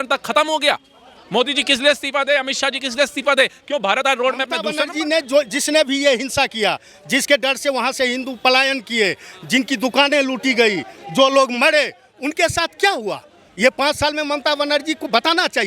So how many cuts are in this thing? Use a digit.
1